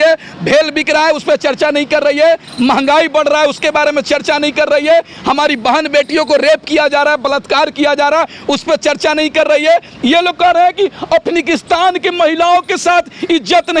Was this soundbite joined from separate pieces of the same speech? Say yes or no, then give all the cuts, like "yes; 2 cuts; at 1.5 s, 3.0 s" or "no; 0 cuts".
no; 0 cuts